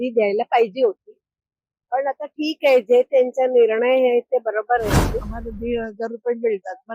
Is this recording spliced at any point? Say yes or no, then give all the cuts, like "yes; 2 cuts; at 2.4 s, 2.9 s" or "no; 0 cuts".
yes; 1 cut; at 5.3 s